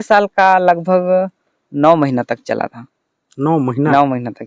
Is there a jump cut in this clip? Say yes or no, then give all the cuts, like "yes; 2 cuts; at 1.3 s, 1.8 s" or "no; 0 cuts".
no; 0 cuts